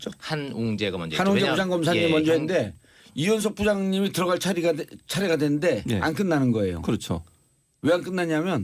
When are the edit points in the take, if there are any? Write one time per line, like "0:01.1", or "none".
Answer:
0:07.2